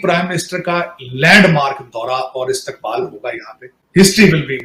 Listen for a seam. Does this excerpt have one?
no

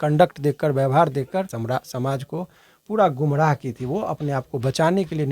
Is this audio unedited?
no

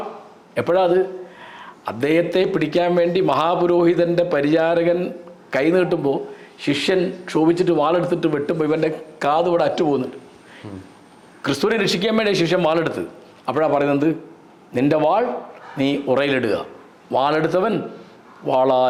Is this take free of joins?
yes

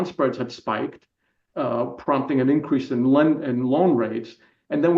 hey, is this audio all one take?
yes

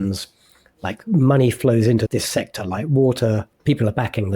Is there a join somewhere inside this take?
yes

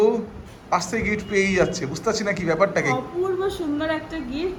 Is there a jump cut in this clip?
no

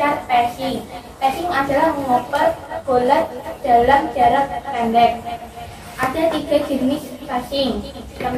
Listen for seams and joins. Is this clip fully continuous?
yes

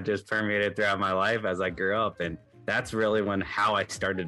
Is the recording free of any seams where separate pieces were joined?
yes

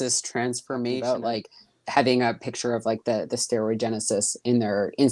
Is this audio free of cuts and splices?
no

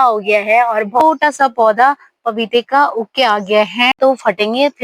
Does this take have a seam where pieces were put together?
yes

